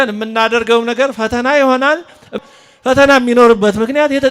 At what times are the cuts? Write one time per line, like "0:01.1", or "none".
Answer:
0:02.4